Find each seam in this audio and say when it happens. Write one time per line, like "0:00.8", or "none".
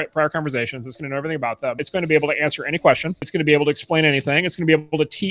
0:01.8
0:03.2